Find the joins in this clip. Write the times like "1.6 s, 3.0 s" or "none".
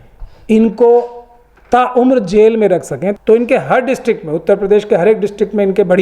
3.1 s